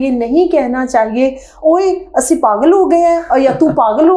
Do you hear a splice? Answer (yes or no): no